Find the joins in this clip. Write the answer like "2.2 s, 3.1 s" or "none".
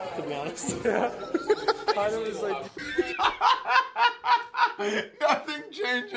2.7 s

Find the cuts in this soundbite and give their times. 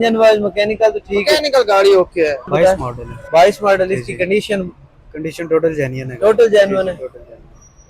2.5 s

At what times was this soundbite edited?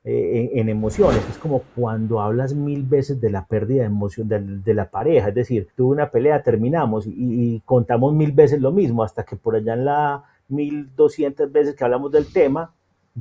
1.3 s, 5.7 s

